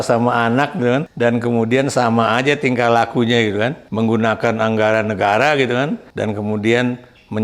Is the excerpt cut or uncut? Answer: cut